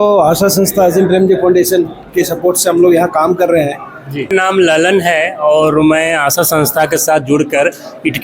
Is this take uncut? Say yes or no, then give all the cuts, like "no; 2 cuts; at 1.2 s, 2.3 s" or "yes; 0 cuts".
no; 1 cut; at 4.3 s